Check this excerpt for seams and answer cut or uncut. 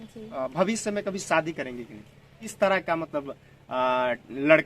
cut